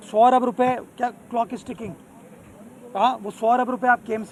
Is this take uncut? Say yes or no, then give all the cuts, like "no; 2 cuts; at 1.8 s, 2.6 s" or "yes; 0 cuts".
yes; 0 cuts